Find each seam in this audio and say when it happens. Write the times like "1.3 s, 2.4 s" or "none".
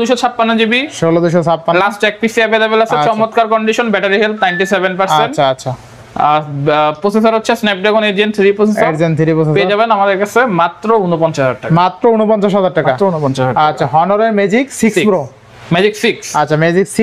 none